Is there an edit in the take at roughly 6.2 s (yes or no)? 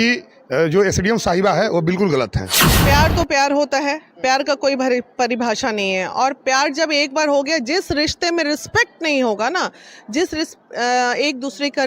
no